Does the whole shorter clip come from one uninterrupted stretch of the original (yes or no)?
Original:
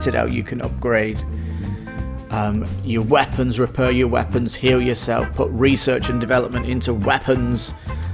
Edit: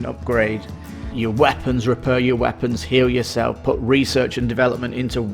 no